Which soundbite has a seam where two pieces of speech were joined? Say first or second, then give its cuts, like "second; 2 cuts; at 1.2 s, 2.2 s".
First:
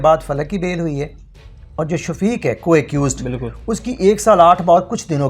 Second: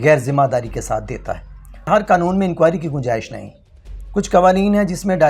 second; 1 cut; at 1.9 s